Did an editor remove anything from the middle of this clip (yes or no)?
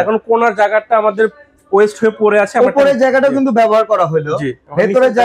no